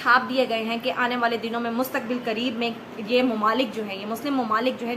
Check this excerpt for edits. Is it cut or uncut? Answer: uncut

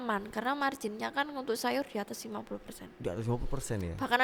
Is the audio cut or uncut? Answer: uncut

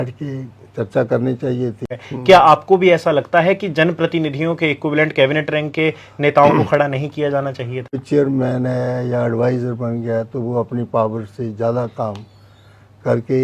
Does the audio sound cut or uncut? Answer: cut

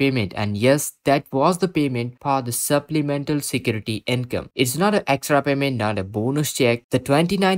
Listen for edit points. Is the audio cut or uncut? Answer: uncut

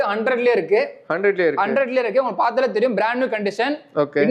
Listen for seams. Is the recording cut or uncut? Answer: uncut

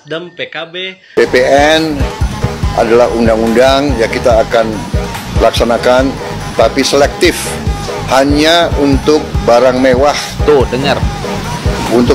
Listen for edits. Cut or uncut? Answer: cut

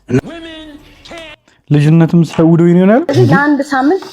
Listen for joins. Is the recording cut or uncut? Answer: cut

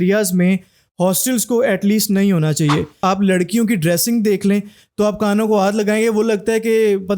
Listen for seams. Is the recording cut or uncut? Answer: cut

